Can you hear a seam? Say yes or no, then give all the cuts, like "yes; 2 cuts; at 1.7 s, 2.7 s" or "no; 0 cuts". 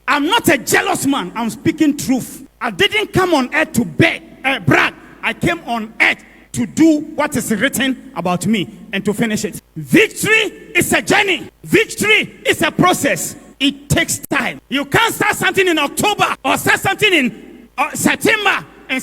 yes; 2 cuts; at 2.5 s, 9.5 s